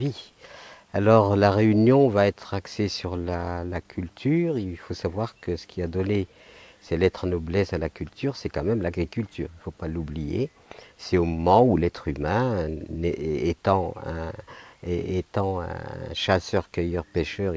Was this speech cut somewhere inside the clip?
yes; 1 cut; at 8.0 s

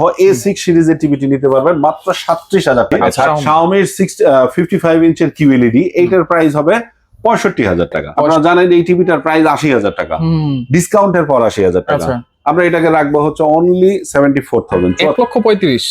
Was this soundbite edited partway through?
yes; 3 cuts; at 3.3 s, 8.1 s, 15.1 s

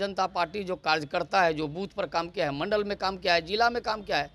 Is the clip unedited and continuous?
yes; 0 cuts

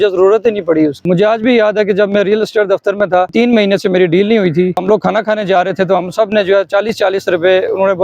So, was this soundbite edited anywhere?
yes; 3 cuts; at 1.1 s, 3.3 s, 4.8 s

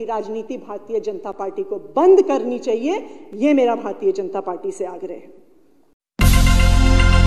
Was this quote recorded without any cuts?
yes; 0 cuts

